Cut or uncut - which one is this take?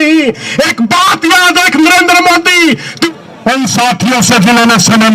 cut